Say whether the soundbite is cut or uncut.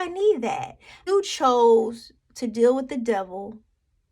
cut